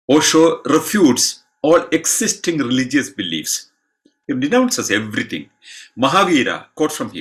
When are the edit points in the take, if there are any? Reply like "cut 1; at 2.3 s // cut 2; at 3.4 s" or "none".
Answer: none